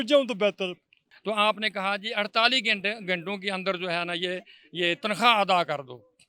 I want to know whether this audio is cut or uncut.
cut